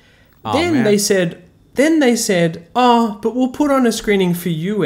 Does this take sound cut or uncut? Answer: uncut